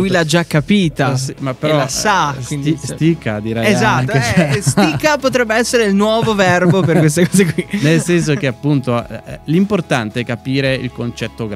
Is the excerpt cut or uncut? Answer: uncut